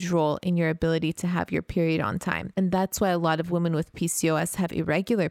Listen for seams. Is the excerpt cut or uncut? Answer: cut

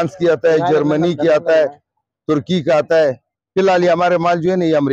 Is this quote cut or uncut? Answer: uncut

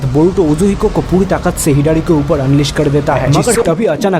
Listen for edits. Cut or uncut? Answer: cut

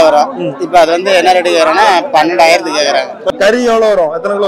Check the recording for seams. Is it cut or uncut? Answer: cut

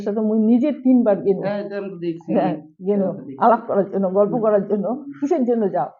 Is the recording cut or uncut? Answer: uncut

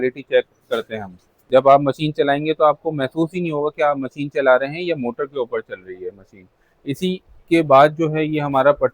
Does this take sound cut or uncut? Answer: cut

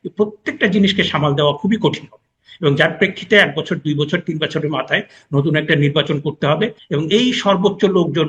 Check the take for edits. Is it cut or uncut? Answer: cut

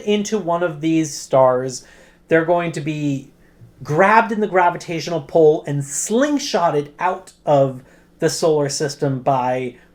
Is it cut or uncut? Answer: uncut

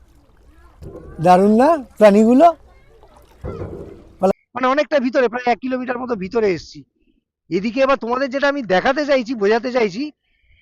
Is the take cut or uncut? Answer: cut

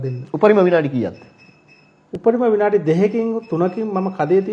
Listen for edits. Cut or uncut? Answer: uncut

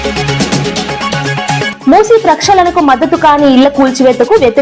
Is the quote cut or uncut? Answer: cut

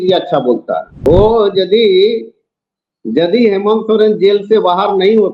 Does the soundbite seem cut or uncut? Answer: cut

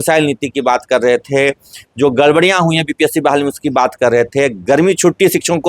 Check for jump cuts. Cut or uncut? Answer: uncut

